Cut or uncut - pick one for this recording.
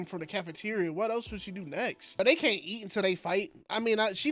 cut